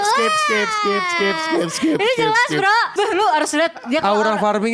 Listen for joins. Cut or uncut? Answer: cut